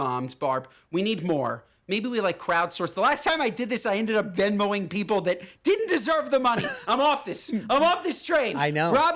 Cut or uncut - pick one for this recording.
uncut